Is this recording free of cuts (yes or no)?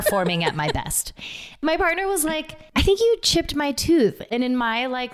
no